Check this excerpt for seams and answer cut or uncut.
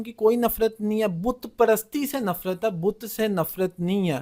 uncut